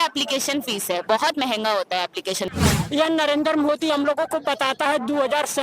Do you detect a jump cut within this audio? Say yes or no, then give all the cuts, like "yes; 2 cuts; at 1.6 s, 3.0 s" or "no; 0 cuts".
yes; 1 cut; at 2.5 s